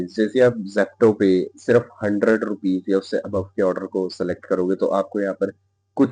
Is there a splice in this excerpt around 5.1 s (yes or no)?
no